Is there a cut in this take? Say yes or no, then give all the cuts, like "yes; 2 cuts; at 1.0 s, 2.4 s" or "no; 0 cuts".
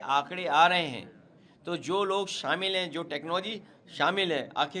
no; 0 cuts